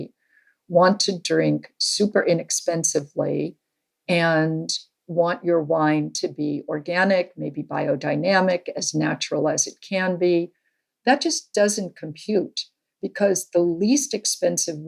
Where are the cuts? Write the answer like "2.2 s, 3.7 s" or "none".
none